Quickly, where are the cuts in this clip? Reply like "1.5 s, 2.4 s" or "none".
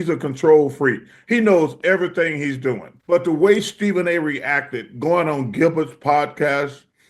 2.9 s

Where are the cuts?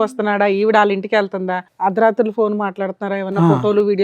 1.6 s

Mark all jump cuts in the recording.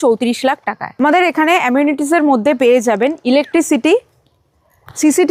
none

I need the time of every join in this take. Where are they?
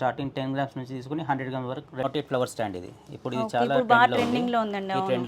2.0 s

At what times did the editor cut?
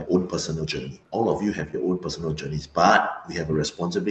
1.0 s

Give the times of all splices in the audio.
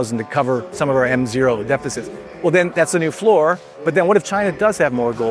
none

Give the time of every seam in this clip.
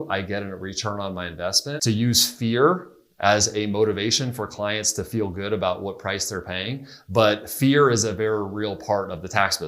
1.7 s

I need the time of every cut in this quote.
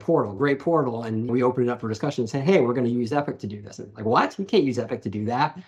none

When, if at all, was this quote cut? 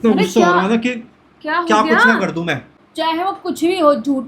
1.1 s, 2.8 s

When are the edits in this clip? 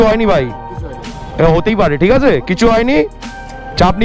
none

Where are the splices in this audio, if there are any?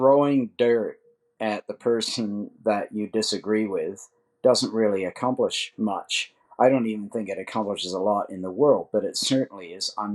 none

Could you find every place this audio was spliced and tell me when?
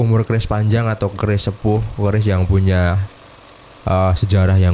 none

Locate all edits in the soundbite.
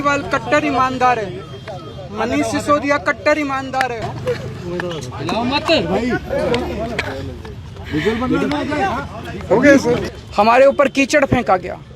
4.1 s, 10.2 s

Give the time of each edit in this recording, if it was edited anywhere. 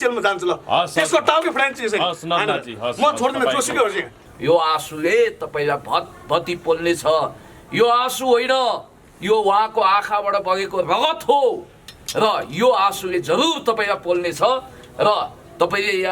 4.2 s

